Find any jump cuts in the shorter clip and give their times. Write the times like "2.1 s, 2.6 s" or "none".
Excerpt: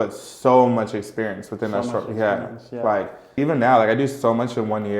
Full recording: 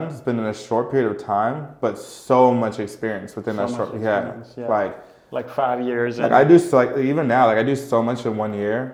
3.4 s

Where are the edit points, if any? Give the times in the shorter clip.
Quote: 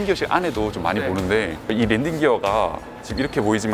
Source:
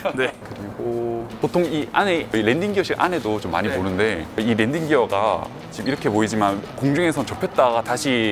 none

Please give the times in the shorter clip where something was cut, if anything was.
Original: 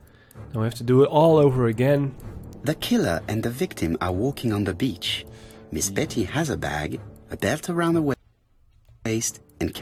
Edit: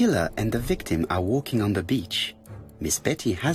none

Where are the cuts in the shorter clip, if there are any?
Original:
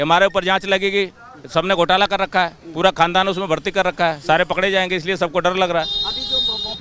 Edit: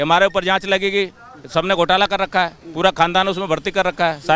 none

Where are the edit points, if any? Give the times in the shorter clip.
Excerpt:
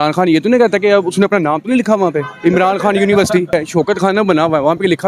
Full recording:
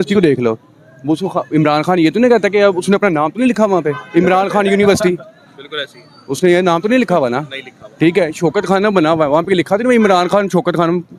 3.5 s

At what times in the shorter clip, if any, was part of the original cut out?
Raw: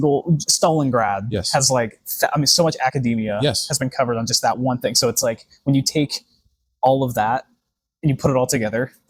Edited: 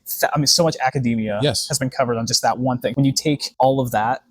3.0 s

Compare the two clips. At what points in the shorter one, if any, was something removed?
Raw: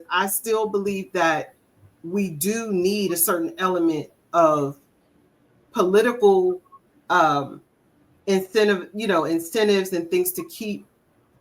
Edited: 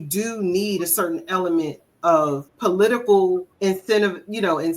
2.5 s, 3.5 s

